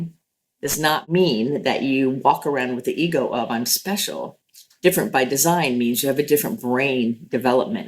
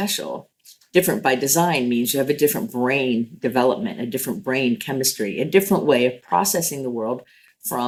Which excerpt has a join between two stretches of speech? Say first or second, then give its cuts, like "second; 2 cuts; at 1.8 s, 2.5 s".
first; 1 cut; at 1.0 s